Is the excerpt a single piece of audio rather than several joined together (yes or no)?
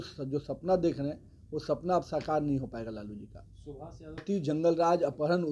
no